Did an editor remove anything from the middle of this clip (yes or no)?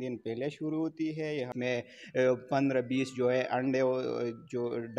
yes